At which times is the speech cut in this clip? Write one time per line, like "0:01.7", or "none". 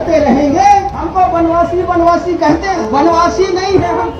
0:01.1
0:02.7